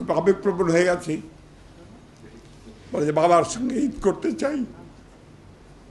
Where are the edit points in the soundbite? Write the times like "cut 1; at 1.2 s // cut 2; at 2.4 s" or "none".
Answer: none